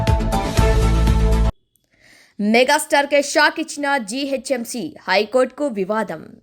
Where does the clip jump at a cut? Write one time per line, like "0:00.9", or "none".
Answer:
0:01.6

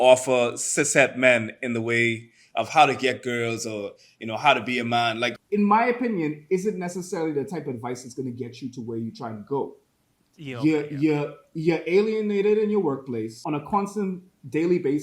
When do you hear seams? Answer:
0:05.3
0:13.4

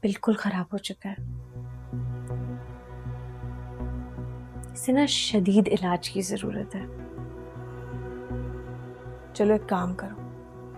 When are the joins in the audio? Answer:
none

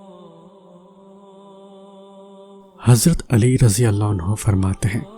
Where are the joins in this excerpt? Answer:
0:02.3

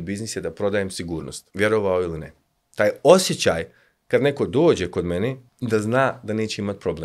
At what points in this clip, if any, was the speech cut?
0:01.4
0:05.5

